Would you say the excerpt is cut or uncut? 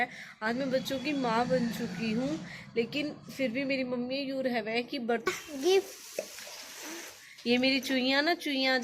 cut